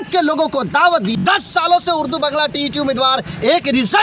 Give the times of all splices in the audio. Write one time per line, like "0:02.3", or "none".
0:01.2